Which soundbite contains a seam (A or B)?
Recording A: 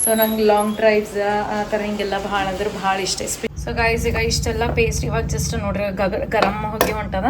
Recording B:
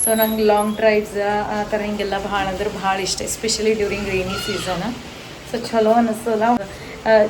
A